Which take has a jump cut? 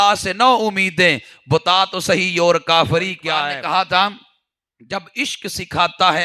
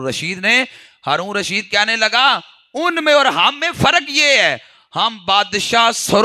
first; 1 cut; at 3.2 s

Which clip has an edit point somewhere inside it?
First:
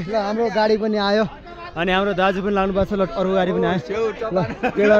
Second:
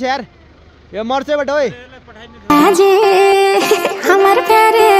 second; 1 cut; at 2.4 s

